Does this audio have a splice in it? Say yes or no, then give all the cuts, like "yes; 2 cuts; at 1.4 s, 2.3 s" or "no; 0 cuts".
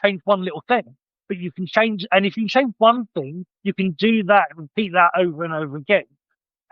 no; 0 cuts